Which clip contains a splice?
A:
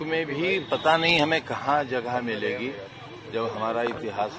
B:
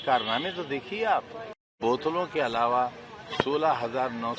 B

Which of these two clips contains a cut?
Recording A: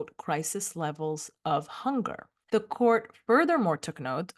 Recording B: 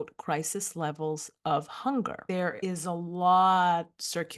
B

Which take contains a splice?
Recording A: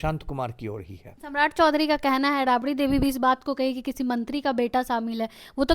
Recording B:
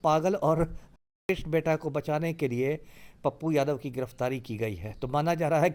A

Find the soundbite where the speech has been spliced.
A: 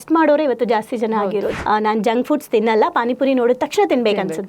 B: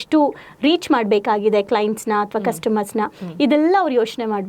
A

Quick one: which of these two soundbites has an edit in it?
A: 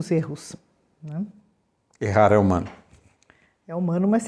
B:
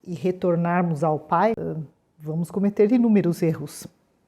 B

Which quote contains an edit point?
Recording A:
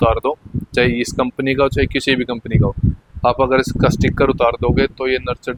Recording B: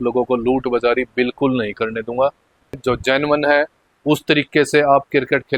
B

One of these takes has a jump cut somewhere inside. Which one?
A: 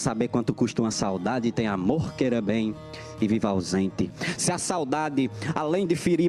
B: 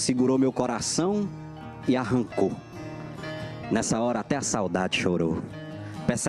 B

